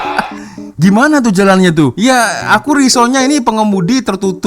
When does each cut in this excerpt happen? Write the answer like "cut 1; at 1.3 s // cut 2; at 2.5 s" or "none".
none